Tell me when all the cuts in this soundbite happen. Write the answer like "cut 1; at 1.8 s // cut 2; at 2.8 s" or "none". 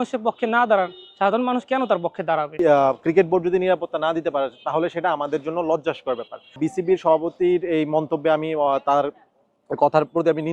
cut 1; at 2.6 s // cut 2; at 6.6 s